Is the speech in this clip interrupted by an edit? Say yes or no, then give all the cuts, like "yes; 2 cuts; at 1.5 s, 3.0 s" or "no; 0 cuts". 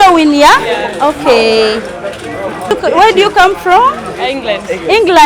yes; 1 cut; at 2.7 s